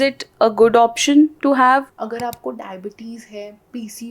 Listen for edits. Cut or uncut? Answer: cut